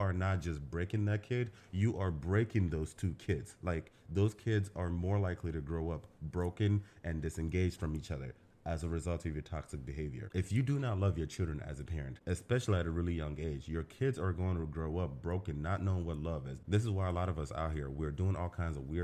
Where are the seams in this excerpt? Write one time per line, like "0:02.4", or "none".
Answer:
0:10.3

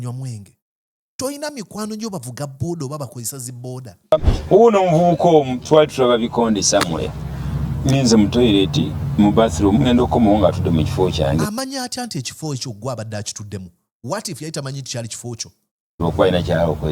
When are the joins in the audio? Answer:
0:04.1

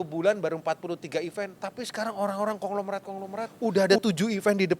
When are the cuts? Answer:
0:01.6
0:03.5

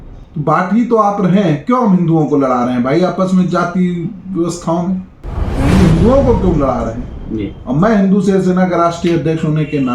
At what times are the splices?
0:05.5

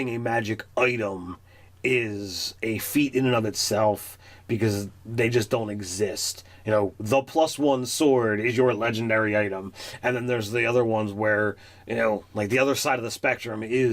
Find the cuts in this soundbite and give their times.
0:09.3

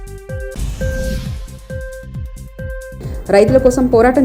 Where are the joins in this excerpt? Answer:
0:02.9

